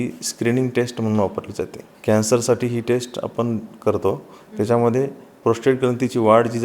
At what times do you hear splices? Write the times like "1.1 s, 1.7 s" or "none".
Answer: 1.8 s

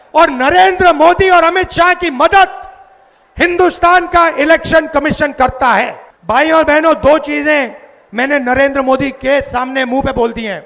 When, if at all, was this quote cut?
6.1 s

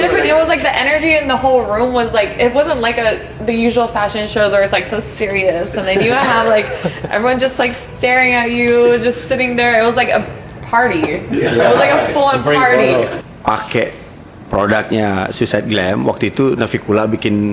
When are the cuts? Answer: 13.2 s

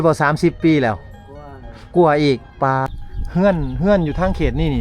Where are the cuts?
2.9 s

